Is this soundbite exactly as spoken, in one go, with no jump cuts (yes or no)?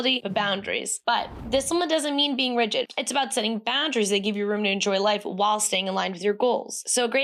yes